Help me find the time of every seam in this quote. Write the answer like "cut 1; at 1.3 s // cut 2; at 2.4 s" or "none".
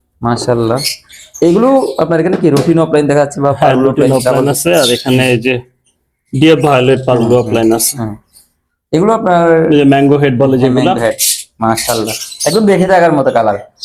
none